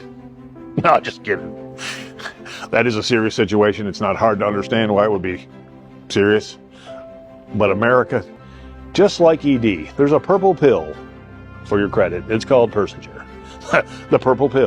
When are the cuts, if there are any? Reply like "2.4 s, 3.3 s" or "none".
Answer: 8.3 s